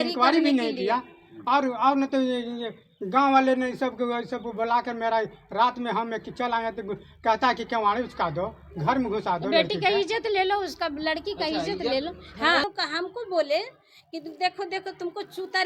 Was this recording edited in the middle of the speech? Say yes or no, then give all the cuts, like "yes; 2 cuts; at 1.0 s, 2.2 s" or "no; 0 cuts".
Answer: yes; 1 cut; at 12.6 s